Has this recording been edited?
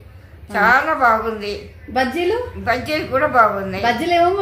no; 0 cuts

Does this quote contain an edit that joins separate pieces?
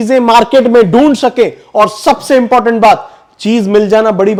no; 0 cuts

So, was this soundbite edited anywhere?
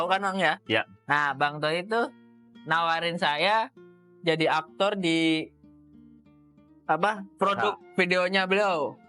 no; 0 cuts

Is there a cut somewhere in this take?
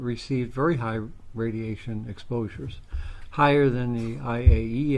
yes; 1 cut; at 1.8 s

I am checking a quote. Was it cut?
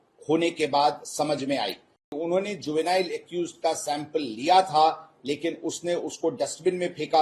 yes; 1 cut; at 2.2 s

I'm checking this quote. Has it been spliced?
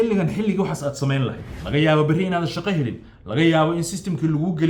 yes; 1 cut; at 1.5 s

